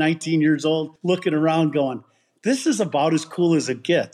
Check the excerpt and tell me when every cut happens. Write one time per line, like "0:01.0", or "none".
0:00.9